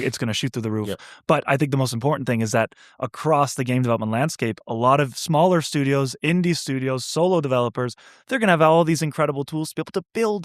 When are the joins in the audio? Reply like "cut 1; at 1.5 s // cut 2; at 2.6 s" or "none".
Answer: none

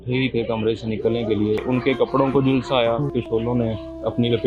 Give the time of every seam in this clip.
cut 1; at 1.6 s

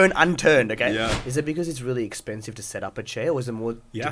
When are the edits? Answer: cut 1; at 1.2 s

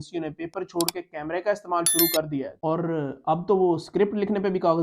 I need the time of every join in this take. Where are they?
cut 1; at 2.5 s

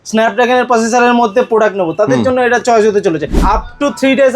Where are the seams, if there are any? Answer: cut 1; at 3.4 s

